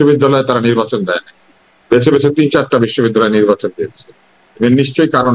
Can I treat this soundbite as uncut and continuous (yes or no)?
yes